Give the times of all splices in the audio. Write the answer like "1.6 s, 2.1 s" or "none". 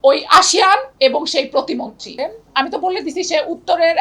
2.2 s